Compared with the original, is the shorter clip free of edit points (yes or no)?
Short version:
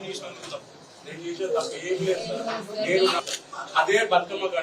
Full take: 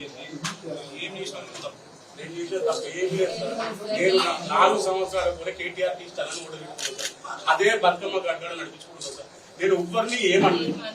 no